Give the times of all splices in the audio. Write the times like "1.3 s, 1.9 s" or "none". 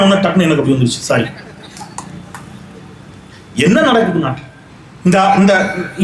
none